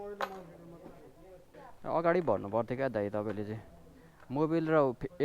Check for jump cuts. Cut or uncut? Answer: cut